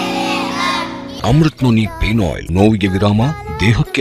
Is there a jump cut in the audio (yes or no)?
yes